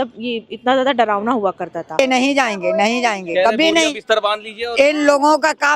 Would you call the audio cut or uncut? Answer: cut